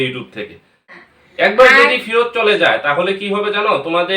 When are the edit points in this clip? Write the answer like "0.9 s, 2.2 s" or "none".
1.0 s